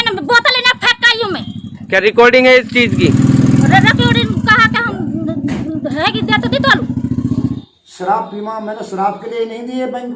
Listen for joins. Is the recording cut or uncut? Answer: cut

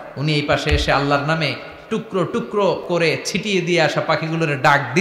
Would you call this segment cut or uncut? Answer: cut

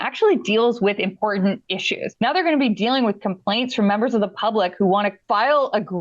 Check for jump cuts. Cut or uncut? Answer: cut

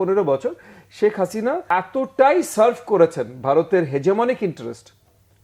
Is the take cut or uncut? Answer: cut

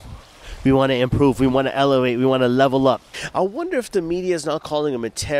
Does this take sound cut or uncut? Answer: cut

